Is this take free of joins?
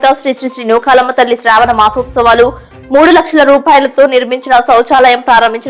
yes; 0 cuts

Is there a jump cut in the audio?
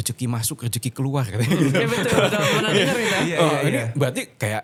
no; 0 cuts

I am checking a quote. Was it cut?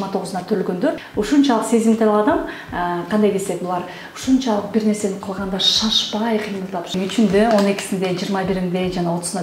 yes; 2 cuts; at 1.0 s, 6.9 s

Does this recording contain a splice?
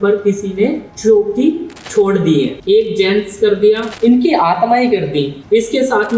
yes; 5 cuts; at 0.9 s, 1.7 s, 2.6 s, 3.9 s, 5.4 s

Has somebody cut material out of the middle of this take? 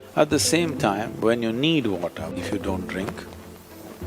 yes; 1 cut; at 2.3 s

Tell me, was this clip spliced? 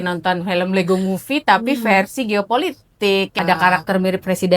yes; 1 cut; at 3.3 s

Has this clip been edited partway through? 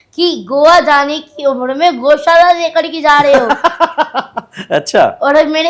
no; 0 cuts

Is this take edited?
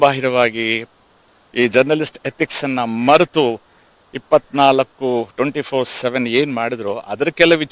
no; 0 cuts

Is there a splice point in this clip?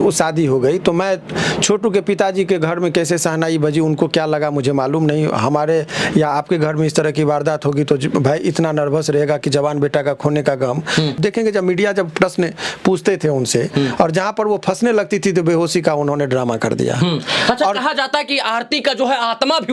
no; 0 cuts

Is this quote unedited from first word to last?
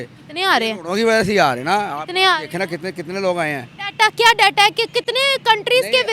yes; 0 cuts

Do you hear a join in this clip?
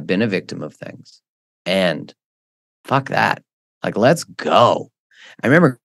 no; 0 cuts

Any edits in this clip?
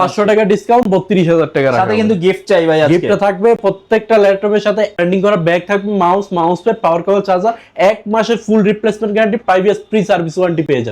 no; 0 cuts

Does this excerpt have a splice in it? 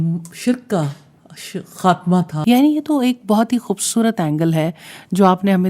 yes; 1 cut; at 2.3 s

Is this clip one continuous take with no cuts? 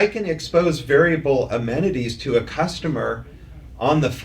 yes; 0 cuts

